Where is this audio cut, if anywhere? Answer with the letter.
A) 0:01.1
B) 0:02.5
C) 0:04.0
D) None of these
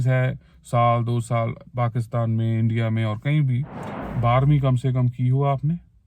C